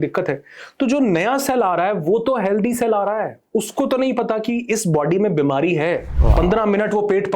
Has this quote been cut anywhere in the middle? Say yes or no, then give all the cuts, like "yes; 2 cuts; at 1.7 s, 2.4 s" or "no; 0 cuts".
yes; 1 cut; at 6.1 s